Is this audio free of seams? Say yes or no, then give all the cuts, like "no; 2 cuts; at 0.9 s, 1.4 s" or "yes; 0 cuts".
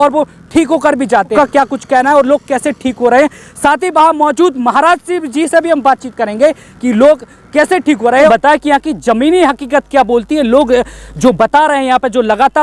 no; 2 cuts; at 1.3 s, 8.3 s